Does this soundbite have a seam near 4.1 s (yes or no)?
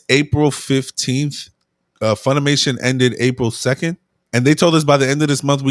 yes